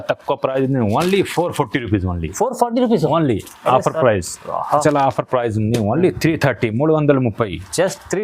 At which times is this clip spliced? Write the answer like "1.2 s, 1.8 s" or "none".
4.8 s